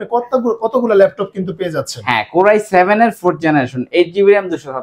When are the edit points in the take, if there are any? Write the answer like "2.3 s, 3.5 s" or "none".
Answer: none